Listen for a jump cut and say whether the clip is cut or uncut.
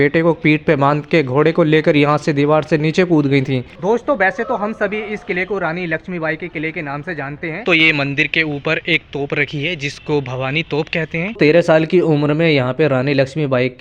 cut